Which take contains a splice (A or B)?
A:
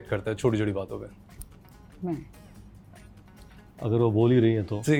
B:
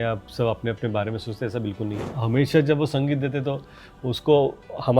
B